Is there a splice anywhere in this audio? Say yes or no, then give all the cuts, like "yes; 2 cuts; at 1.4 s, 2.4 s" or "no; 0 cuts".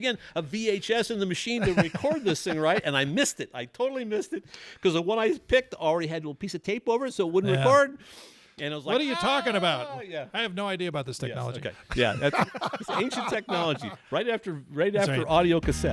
no; 0 cuts